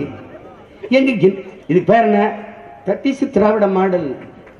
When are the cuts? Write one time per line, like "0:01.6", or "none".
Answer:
0:01.5

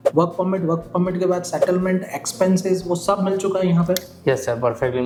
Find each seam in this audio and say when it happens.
none

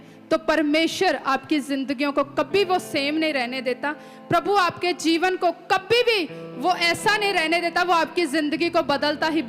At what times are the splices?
none

